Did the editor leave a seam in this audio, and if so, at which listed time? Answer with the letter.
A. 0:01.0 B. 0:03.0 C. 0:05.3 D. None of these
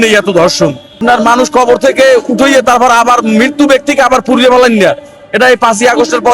A